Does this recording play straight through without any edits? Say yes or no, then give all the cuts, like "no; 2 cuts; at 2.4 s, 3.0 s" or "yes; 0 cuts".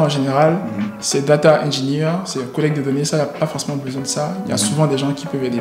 yes; 0 cuts